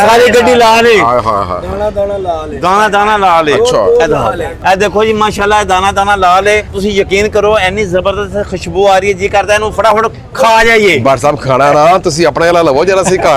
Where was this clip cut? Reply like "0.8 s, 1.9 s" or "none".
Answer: none